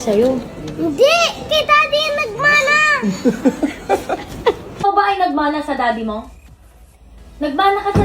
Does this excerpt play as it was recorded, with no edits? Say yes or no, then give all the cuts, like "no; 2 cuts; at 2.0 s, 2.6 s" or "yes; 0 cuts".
no; 1 cut; at 4.8 s